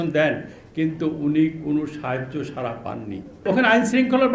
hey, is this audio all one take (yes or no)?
no